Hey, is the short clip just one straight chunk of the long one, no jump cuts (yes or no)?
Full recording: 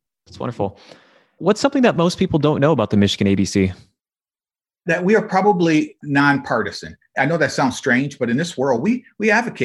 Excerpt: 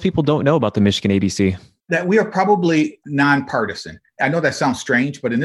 no